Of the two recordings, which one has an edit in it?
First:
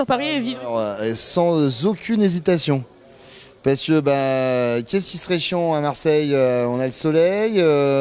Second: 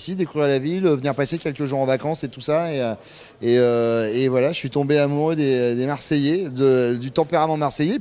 second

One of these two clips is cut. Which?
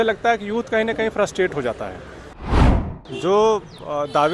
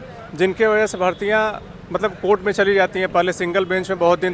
first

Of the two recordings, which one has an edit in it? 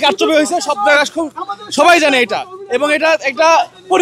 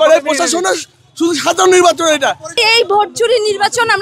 second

